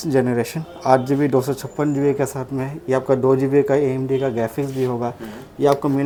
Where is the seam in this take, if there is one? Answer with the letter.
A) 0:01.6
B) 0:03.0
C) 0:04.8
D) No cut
D